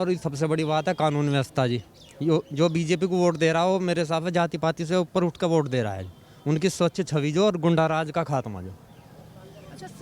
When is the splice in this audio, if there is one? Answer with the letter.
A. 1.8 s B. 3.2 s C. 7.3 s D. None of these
D